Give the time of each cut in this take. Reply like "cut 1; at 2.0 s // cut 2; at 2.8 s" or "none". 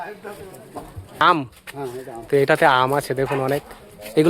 cut 1; at 1.2 s